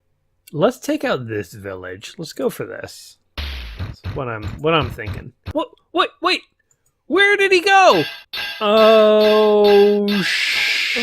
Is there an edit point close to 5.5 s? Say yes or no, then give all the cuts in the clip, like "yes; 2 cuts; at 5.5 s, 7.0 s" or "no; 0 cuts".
yes; 1 cut; at 5.5 s